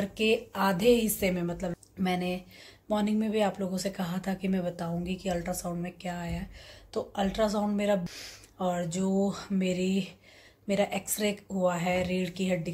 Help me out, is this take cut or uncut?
cut